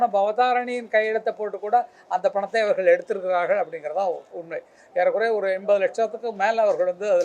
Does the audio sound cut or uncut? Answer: uncut